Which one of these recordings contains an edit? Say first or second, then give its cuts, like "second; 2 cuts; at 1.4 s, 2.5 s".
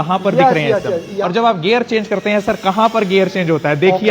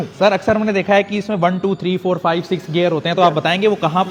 first; 1 cut; at 1.2 s